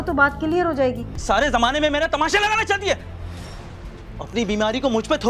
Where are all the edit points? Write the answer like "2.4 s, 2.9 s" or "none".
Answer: 1.1 s